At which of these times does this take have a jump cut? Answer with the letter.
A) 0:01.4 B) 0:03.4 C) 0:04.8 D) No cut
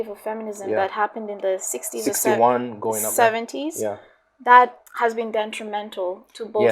C